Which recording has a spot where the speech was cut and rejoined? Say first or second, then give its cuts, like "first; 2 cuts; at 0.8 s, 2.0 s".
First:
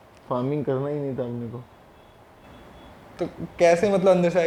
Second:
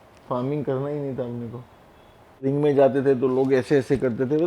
second; 1 cut; at 2.4 s